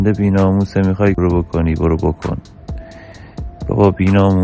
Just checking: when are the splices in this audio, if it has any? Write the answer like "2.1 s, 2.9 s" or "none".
1.2 s